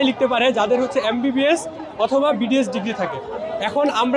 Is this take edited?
no; 0 cuts

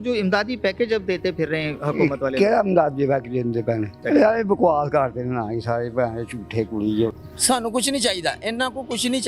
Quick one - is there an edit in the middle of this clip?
yes; 2 cuts; at 4.0 s, 7.3 s

